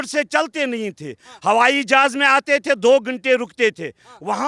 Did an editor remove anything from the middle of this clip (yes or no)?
no